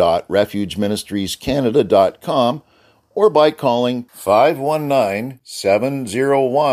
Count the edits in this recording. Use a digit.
0